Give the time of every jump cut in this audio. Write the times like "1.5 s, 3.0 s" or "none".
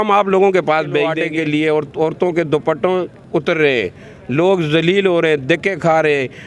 1.2 s